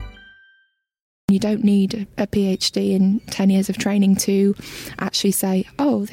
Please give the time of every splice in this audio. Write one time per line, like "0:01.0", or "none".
0:01.3